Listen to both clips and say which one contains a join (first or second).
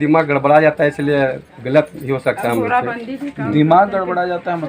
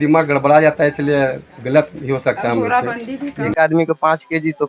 second